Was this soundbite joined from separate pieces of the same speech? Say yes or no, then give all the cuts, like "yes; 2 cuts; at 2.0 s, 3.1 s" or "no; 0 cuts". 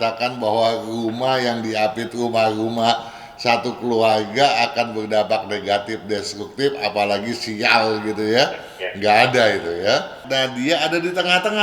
yes; 1 cut; at 10.2 s